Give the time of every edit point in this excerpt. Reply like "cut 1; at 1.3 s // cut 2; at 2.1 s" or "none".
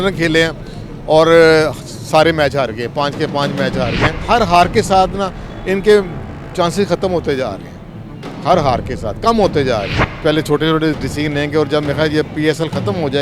cut 1; at 4.2 s // cut 2; at 10.0 s